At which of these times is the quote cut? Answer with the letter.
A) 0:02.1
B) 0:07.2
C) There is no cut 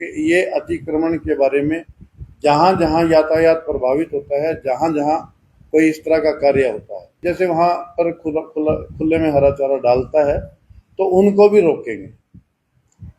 B